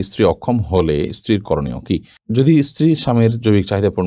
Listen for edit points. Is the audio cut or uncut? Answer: uncut